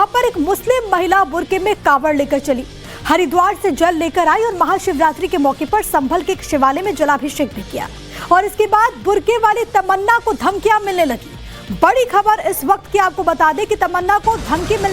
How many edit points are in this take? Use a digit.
1